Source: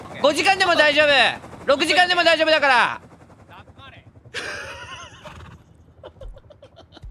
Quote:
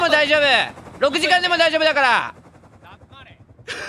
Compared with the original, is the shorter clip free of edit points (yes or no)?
yes